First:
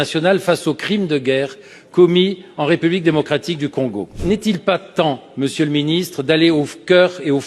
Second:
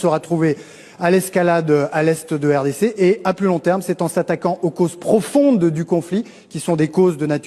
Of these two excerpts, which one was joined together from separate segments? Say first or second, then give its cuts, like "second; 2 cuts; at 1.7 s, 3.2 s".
first; 1 cut; at 4.2 s